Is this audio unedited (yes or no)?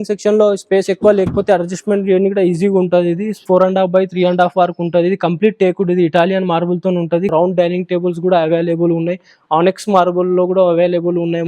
no